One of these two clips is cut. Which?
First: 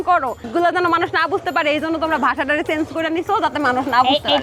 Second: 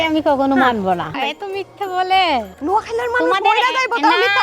second; 2 cuts; at 1.2 s, 2.5 s

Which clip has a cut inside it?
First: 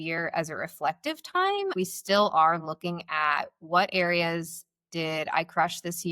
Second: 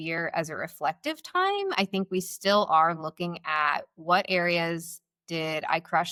first; 1 cut; at 1.7 s

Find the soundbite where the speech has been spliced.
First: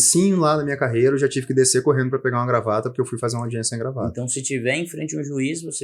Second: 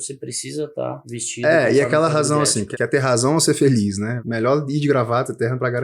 second; 3 cuts; at 1.1 s, 2.6 s, 4.2 s

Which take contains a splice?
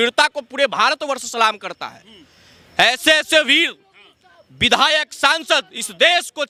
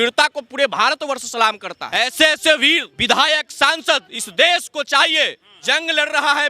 second; 3 cuts; at 1.9 s, 2.9 s, 5.5 s

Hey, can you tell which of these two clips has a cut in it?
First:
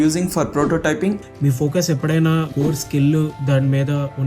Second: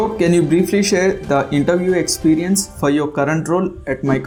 first; 3 cuts; at 1.2 s, 2.5 s, 3.4 s

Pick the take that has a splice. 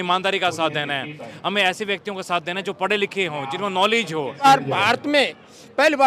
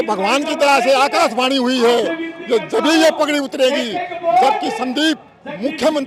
first; 1 cut; at 4.4 s

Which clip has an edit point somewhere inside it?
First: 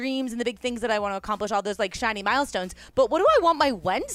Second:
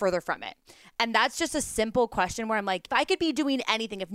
second; 1 cut; at 2.8 s

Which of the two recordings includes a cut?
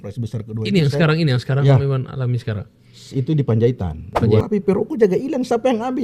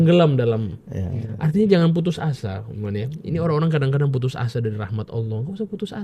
first; 1 cut; at 4.4 s

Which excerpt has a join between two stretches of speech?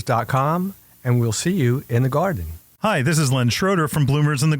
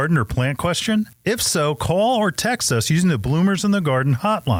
first; 1 cut; at 2.8 s

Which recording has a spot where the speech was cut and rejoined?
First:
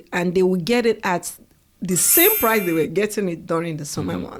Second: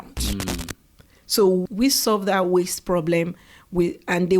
second; 1 cut; at 1.6 s

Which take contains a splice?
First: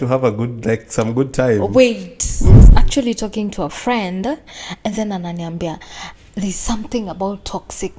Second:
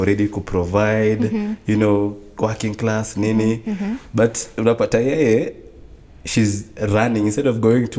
first; 1 cut; at 2.6 s

